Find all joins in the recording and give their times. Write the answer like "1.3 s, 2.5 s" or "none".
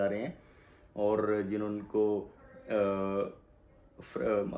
none

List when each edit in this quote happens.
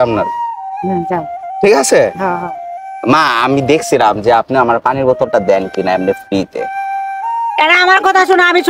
none

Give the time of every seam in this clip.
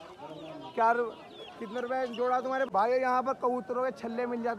2.7 s

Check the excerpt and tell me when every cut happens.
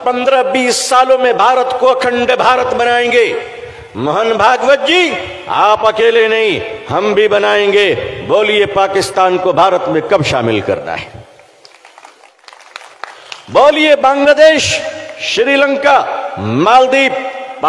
12.4 s

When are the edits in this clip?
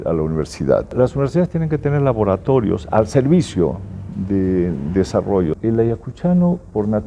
0.9 s, 5.5 s

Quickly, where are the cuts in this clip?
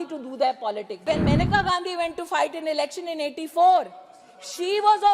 1.0 s

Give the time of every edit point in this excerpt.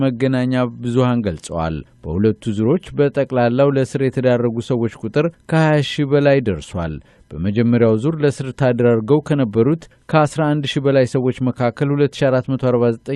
none

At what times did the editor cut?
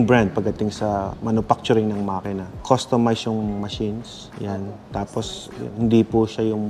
none

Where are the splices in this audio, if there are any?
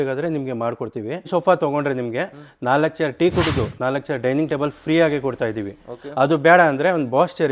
1.3 s

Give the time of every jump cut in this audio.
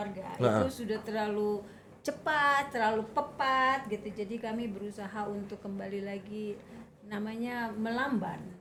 none

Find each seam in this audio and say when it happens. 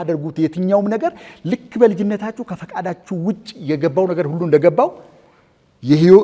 none

